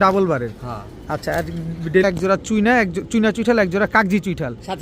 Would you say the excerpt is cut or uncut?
cut